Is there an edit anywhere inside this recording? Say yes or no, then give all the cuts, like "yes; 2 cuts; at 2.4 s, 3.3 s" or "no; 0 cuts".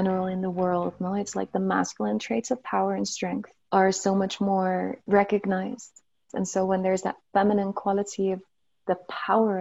yes; 3 cuts; at 3.5 s, 5.0 s, 6.2 s